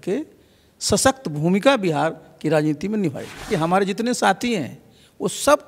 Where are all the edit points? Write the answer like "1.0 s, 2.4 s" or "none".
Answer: 3.5 s